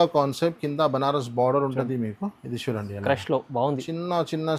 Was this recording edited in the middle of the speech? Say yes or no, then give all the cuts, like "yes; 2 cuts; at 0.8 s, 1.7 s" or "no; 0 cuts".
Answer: no; 0 cuts